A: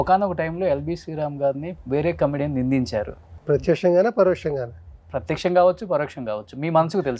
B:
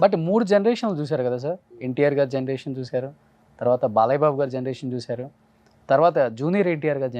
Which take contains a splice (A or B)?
A